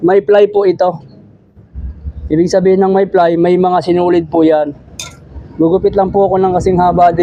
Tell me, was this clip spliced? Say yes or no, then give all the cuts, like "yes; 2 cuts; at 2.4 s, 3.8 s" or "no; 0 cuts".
no; 0 cuts